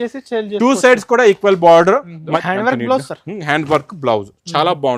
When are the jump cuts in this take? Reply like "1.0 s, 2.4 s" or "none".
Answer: 2.4 s